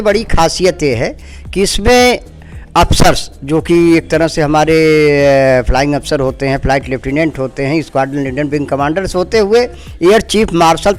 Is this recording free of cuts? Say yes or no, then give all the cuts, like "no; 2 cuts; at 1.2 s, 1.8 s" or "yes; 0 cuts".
yes; 0 cuts